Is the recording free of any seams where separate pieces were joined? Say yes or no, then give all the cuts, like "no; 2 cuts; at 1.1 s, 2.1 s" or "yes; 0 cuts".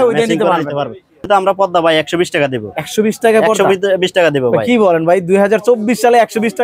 no; 1 cut; at 1.3 s